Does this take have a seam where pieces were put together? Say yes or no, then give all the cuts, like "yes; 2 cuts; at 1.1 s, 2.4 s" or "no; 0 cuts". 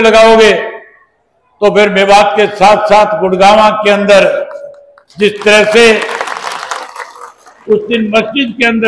no; 0 cuts